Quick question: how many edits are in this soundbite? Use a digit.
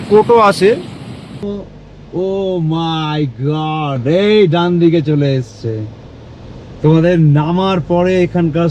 1